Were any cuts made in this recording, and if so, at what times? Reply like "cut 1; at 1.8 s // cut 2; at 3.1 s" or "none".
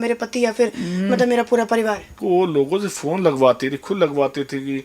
cut 1; at 2.2 s